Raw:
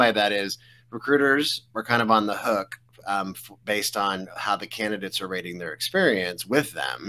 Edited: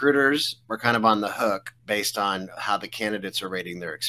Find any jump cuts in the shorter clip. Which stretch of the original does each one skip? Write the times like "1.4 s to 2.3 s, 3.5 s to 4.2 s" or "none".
2.8 s to 3.5 s